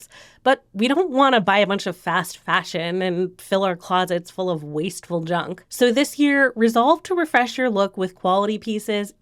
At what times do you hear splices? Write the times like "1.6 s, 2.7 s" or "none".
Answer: none